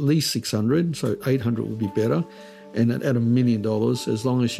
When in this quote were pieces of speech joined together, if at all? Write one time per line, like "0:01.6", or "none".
none